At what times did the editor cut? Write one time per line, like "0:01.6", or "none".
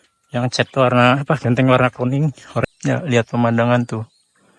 0:02.6